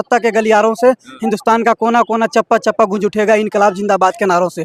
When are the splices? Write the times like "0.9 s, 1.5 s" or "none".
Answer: none